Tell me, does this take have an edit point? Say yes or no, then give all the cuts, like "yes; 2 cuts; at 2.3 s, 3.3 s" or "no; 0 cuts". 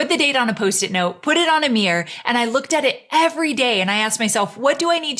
no; 0 cuts